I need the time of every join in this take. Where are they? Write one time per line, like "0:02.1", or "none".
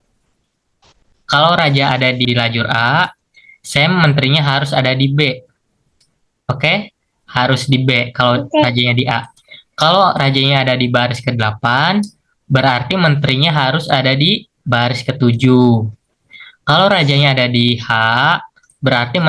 0:02.3